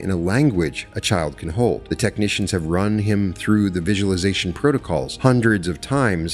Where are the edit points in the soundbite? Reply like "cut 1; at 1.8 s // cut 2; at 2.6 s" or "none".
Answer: cut 1; at 1.8 s // cut 2; at 5.1 s